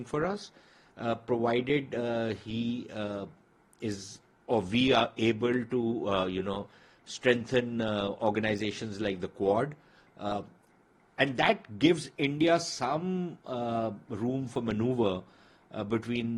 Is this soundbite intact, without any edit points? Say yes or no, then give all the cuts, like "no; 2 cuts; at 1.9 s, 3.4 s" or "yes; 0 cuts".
yes; 0 cuts